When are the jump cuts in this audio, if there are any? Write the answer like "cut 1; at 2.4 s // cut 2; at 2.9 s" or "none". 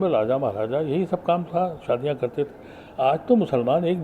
none